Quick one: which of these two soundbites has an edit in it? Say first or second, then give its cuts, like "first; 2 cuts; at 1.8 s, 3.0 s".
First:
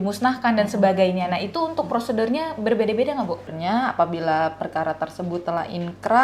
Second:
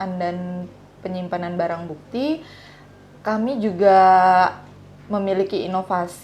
first; 1 cut; at 3.5 s